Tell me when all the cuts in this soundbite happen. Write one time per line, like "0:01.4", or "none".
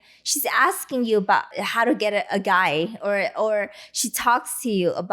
0:01.6